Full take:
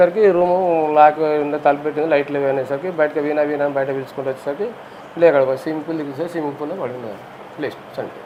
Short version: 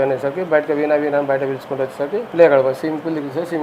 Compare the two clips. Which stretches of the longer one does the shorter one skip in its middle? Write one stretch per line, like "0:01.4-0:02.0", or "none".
0:04.7-0:05.1